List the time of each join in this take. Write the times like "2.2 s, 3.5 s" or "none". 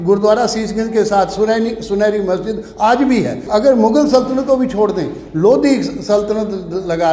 3.4 s